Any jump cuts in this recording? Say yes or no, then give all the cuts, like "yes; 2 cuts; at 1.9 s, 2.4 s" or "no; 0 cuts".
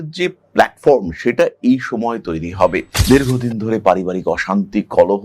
yes; 1 cut; at 2.9 s